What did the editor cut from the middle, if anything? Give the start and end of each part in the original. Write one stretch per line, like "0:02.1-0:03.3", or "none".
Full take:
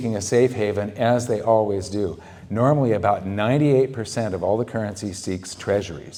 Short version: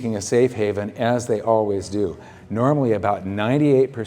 none